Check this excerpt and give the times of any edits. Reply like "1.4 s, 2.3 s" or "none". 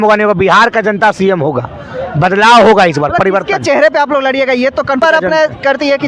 5.0 s